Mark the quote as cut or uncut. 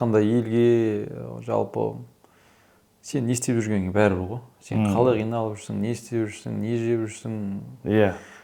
uncut